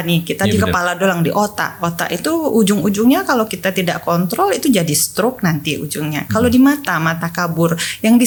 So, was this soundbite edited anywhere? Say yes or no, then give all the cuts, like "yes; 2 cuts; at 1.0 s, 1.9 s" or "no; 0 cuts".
no; 0 cuts